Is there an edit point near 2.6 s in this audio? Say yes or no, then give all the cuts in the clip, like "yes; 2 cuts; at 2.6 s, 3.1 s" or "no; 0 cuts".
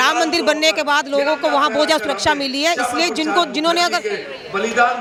no; 0 cuts